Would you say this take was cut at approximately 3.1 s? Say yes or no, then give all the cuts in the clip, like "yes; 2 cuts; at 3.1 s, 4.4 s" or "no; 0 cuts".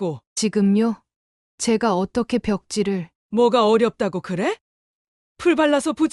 yes; 1 cut; at 3.1 s